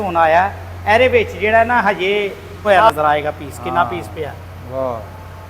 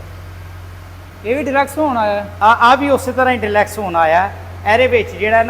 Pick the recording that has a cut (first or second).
first